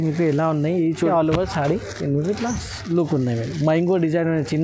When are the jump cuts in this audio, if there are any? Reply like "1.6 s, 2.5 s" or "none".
1.1 s